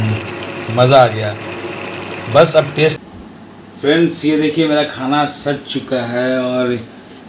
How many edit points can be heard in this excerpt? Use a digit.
1